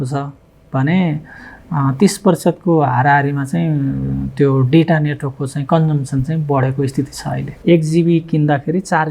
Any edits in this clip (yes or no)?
yes